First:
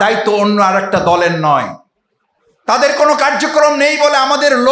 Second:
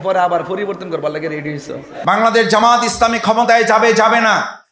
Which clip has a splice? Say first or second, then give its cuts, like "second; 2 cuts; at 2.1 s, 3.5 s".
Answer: second; 1 cut; at 2.0 s